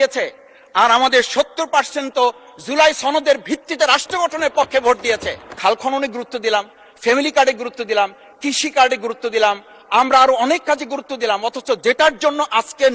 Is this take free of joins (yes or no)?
no